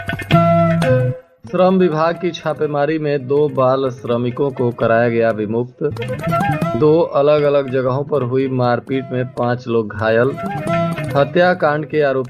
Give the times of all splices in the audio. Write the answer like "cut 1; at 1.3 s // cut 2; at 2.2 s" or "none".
cut 1; at 1.3 s

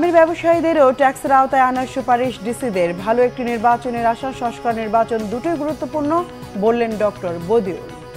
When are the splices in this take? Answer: none

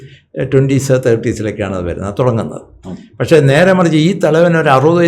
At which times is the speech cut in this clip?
none

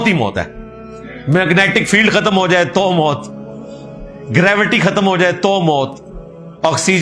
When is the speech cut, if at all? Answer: none

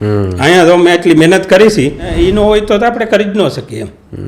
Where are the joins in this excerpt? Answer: cut 1; at 2.1 s

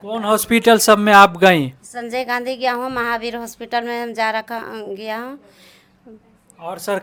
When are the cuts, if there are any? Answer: none

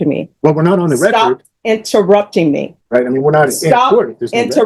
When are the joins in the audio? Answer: cut 1; at 2.7 s

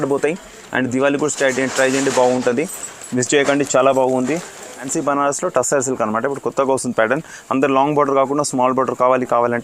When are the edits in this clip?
cut 1; at 4.9 s

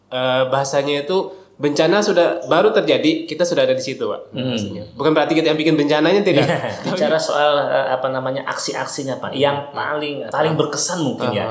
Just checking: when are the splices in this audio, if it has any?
cut 1; at 6.8 s // cut 2; at 10.2 s

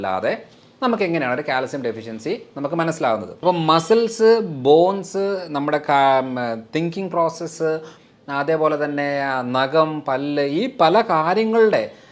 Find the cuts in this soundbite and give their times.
cut 1; at 3.4 s

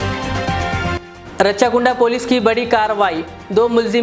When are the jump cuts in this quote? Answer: cut 1; at 1.1 s

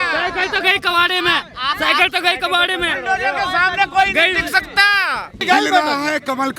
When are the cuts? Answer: cut 1; at 5.4 s

